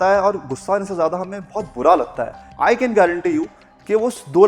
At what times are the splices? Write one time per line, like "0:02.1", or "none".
0:02.4